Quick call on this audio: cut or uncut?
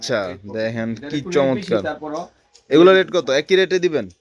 uncut